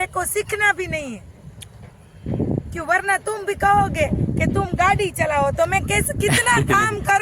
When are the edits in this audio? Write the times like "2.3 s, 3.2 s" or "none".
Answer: none